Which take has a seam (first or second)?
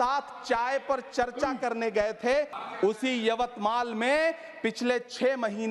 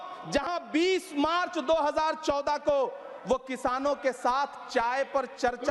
first